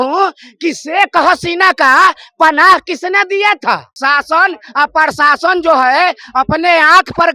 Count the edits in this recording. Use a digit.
1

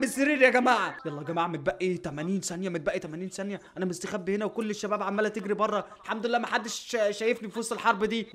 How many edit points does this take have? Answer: 1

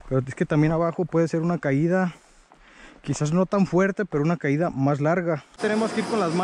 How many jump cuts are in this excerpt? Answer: 1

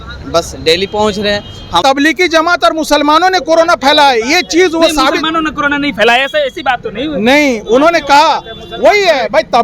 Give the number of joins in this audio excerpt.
1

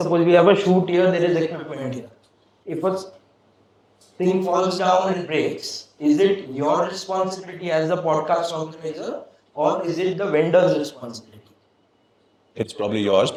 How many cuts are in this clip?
0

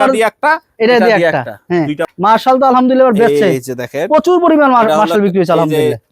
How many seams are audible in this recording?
1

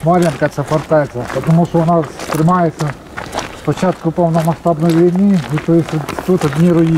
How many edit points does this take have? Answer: 0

